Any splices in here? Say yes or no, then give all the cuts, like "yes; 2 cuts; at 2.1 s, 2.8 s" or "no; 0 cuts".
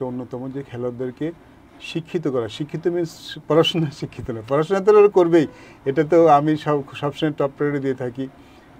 no; 0 cuts